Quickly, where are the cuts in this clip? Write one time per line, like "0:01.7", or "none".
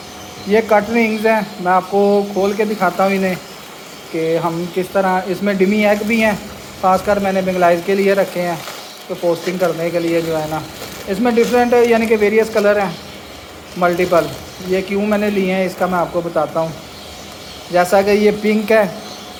none